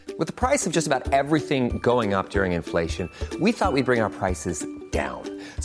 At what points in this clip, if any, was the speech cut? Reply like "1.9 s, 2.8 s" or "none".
none